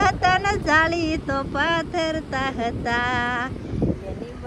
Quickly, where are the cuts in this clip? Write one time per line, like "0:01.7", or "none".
none